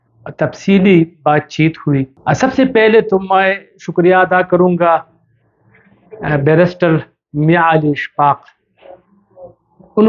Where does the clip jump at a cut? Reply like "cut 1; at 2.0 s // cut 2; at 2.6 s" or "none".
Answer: cut 1; at 2.1 s